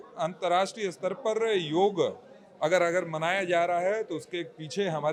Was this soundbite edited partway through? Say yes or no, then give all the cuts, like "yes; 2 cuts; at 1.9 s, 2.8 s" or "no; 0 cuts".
no; 0 cuts